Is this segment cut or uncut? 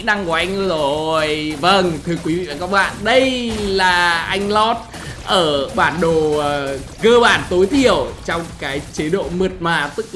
uncut